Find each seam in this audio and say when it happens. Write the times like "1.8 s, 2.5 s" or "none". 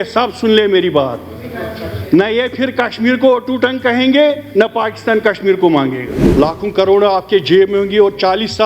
6.2 s